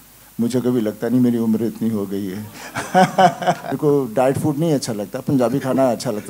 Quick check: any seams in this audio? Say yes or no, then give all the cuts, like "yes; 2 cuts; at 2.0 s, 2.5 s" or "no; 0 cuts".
yes; 1 cut; at 3.7 s